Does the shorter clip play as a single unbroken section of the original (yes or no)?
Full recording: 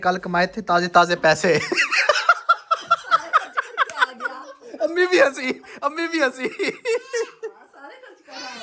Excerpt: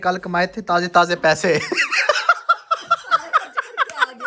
yes